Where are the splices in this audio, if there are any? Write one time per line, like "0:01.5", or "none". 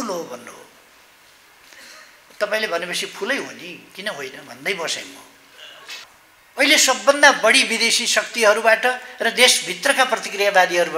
0:06.1